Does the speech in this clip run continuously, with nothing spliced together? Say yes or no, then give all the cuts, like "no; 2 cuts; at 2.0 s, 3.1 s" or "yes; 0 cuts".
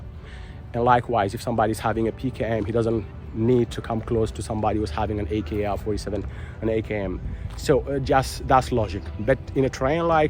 yes; 0 cuts